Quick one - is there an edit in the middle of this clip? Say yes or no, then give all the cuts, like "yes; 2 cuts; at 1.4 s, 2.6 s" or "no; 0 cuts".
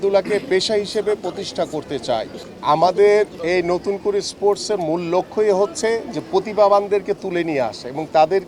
yes; 1 cut; at 2.4 s